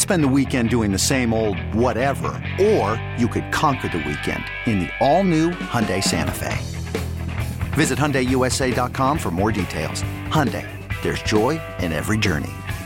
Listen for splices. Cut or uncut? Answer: uncut